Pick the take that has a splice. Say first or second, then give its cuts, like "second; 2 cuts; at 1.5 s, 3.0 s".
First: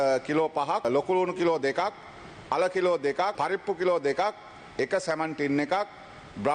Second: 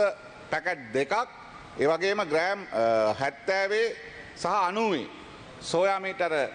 first; 2 cuts; at 0.8 s, 3.3 s